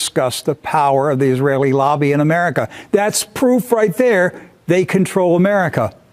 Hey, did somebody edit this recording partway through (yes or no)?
no